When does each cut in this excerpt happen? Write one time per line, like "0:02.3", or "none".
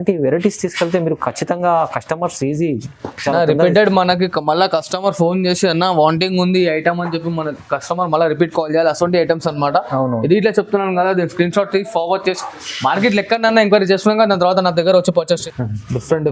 0:15.4